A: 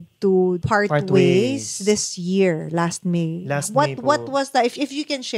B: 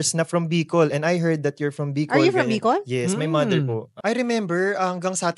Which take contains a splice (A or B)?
B